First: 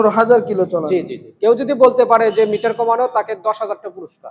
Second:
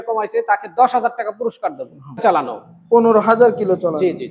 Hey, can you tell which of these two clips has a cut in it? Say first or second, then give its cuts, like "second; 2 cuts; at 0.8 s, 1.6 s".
second; 1 cut; at 2.2 s